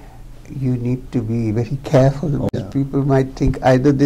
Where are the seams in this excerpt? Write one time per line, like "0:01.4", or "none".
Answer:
0:02.5